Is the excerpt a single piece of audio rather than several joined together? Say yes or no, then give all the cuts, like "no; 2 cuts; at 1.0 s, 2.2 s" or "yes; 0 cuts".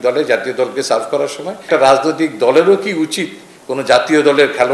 no; 1 cut; at 1.7 s